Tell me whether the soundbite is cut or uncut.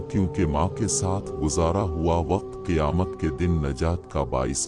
uncut